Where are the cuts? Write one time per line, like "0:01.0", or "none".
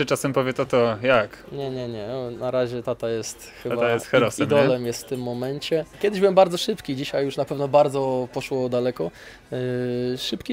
0:05.9